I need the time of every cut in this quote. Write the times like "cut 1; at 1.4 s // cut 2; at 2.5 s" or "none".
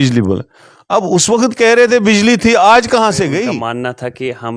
cut 1; at 3.5 s